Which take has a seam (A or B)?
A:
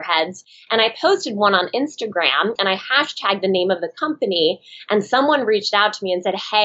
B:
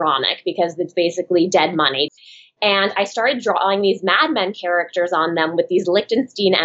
B